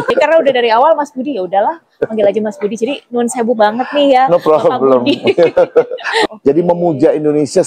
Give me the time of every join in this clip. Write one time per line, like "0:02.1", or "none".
0:06.2